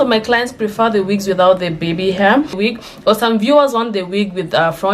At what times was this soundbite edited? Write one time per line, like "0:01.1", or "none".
0:02.7